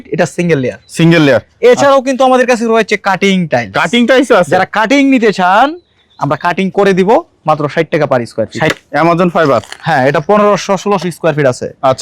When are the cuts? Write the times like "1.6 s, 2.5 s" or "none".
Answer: 8.7 s